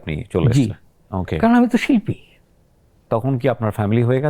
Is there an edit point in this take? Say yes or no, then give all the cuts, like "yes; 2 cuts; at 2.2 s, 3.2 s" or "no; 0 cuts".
yes; 1 cut; at 3.0 s